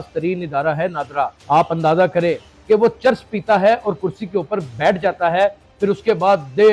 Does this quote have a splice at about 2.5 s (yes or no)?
yes